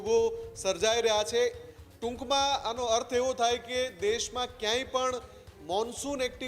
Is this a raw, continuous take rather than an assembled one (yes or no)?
yes